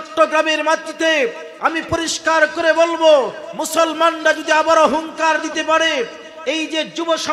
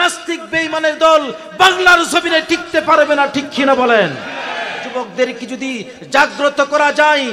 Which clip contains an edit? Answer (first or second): second